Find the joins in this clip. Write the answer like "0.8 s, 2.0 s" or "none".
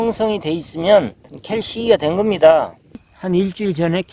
3.1 s